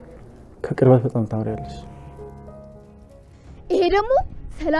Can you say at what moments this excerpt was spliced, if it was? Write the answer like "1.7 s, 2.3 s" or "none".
2.8 s